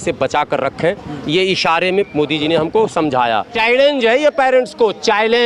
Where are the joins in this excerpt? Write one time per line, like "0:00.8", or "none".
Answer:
0:03.5